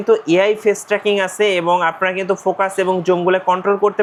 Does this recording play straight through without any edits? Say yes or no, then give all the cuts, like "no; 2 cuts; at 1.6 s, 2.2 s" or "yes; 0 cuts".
yes; 0 cuts